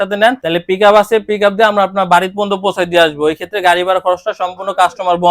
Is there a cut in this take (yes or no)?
no